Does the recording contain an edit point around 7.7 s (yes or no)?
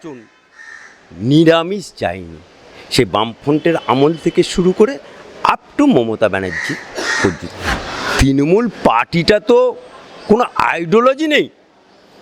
yes